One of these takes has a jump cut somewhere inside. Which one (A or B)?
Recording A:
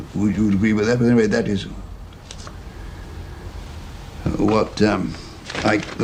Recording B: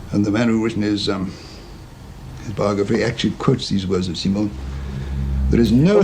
B